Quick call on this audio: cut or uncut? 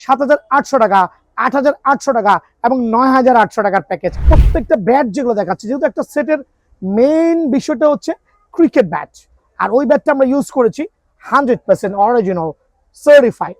cut